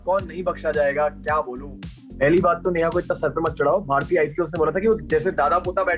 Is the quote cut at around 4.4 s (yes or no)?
no